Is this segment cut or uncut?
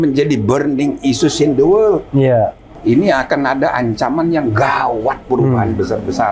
cut